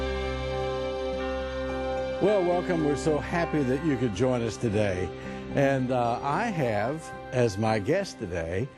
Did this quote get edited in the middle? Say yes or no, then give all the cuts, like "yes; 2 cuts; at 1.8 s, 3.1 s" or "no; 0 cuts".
no; 0 cuts